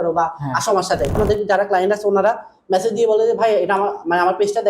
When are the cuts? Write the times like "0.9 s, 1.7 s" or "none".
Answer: 1.2 s